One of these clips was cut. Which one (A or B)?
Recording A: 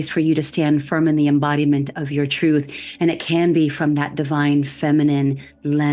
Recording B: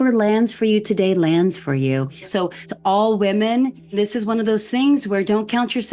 B